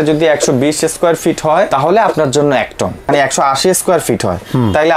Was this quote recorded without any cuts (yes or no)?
no